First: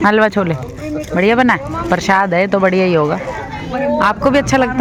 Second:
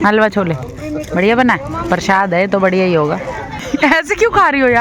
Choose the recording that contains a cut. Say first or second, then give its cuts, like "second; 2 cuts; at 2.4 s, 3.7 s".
second; 1 cut; at 3.7 s